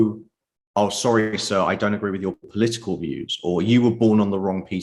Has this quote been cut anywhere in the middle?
no; 0 cuts

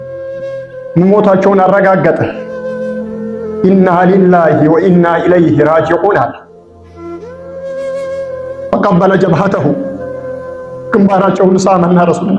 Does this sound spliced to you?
no; 0 cuts

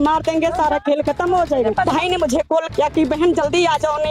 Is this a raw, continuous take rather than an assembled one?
no; 1 cut; at 1.9 s

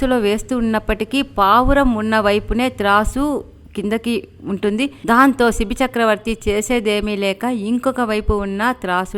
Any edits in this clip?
no; 0 cuts

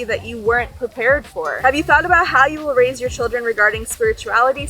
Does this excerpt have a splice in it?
yes; 1 cut; at 1.6 s

